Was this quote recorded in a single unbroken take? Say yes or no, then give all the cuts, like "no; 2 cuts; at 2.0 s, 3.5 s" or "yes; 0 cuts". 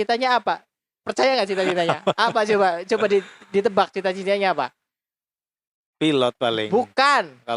yes; 0 cuts